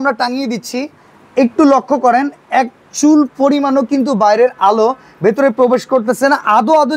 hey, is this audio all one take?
yes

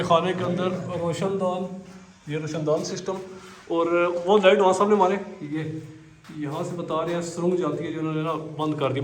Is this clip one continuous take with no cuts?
yes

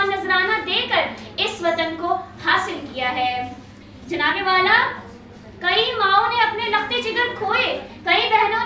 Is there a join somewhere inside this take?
no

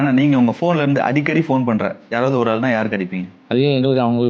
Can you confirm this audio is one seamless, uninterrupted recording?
no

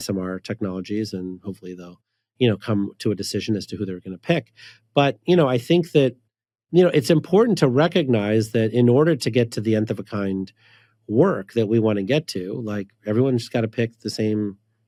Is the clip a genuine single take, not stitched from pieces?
yes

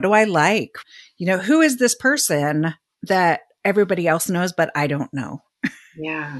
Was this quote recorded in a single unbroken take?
yes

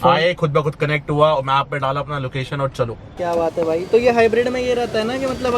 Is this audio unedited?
no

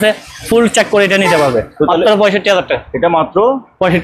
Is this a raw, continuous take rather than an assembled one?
yes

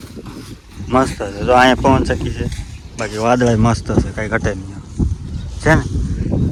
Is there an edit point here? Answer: no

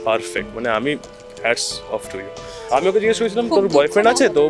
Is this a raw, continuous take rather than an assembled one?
no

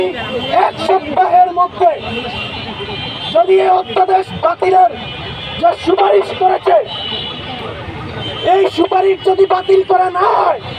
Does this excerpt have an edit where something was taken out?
no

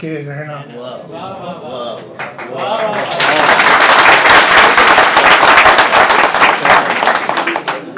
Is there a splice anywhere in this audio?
no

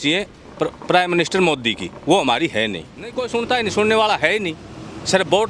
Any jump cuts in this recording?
yes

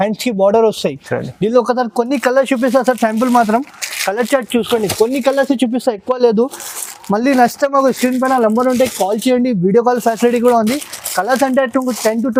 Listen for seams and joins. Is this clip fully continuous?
yes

